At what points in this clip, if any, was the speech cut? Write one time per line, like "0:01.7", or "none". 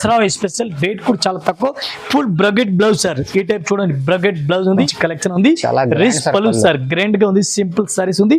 0:04.9